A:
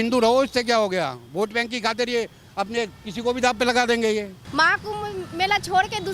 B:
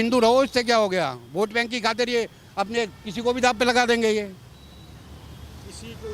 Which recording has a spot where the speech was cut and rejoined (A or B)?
A